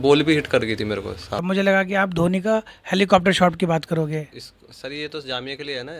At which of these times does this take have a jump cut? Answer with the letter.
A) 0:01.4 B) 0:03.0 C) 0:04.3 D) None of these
A